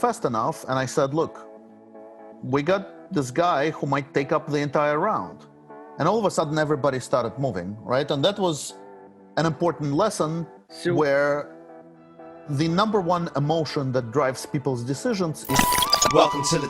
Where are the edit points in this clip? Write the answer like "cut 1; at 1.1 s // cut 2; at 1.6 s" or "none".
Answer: cut 1; at 15.6 s